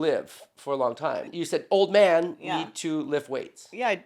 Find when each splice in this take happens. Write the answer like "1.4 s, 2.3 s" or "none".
1.3 s